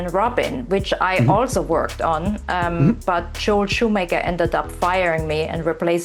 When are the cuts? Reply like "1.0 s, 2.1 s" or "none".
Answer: none